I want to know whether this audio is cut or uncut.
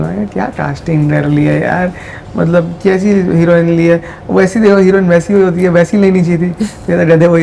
uncut